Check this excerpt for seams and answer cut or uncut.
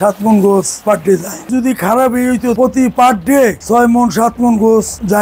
cut